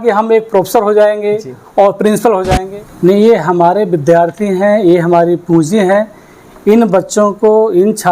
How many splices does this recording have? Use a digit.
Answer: 1